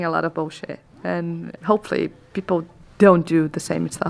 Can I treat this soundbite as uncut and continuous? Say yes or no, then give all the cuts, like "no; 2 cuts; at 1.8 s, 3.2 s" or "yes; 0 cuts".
yes; 0 cuts